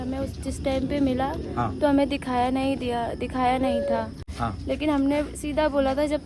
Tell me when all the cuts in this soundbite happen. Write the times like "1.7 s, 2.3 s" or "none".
4.3 s